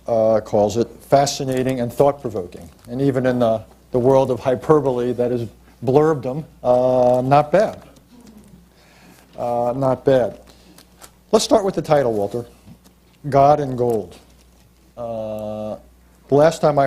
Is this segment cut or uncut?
cut